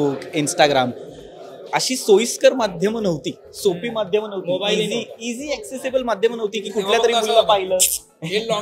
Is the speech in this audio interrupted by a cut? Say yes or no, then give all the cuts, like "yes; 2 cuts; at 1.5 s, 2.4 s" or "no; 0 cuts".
no; 0 cuts